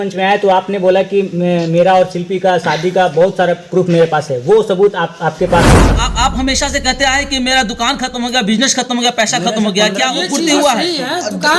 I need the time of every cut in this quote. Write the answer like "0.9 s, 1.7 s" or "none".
5.8 s